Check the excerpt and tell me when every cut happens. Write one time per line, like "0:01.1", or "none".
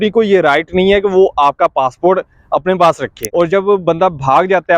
0:03.1